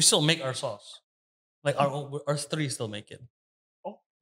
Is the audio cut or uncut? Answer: cut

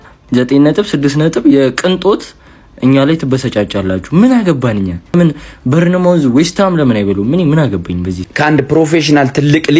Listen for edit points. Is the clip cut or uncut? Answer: cut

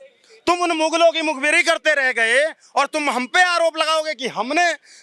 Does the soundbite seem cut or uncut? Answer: uncut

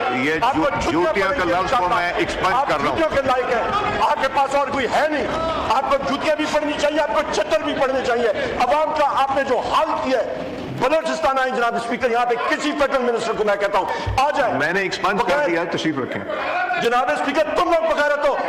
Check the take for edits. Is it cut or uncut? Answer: uncut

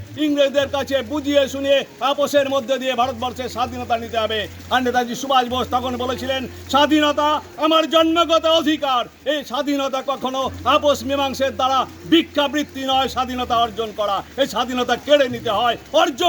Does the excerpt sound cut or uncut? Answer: uncut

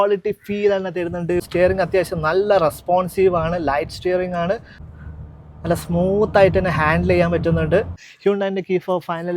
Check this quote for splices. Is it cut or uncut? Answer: cut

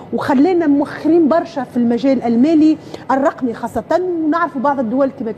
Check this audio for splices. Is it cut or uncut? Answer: uncut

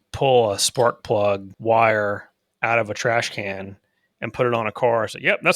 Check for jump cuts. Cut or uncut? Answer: cut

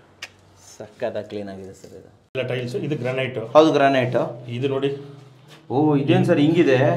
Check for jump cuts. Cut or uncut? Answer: cut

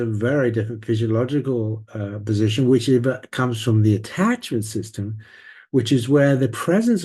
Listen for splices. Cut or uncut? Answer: uncut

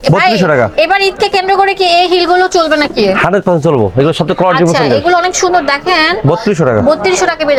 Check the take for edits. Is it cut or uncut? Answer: uncut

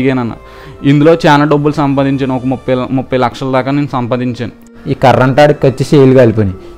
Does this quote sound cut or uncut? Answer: cut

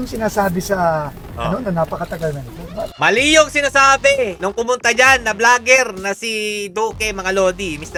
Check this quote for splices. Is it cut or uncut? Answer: uncut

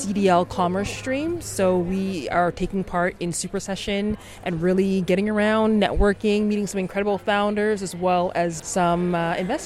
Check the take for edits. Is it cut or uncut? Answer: cut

